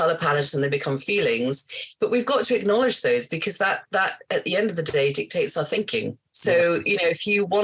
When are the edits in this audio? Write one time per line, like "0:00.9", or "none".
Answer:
0:06.2

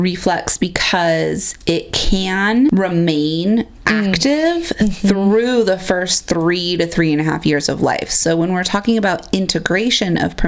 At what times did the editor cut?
0:02.7
0:03.8

